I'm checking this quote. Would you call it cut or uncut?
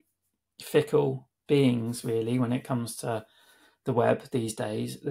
cut